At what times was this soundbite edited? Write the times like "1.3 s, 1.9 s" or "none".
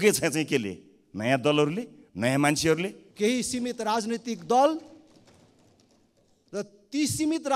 3.0 s